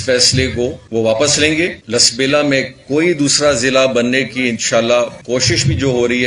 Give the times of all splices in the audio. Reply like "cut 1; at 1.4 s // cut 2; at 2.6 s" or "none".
cut 1; at 0.8 s // cut 2; at 1.8 s // cut 3; at 5.2 s